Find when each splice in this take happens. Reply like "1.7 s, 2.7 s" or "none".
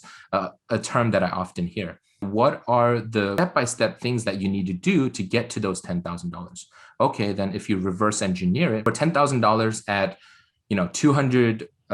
2.3 s, 3.4 s, 8.8 s